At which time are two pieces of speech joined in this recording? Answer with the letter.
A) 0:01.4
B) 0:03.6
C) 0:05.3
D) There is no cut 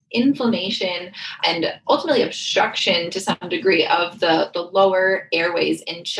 A